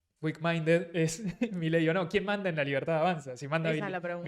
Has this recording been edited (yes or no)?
no